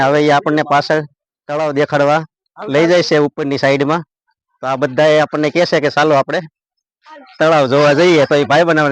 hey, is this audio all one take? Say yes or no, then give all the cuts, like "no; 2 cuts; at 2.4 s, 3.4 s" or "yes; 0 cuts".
yes; 0 cuts